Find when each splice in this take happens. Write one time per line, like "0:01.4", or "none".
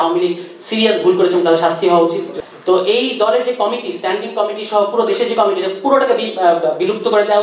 0:02.3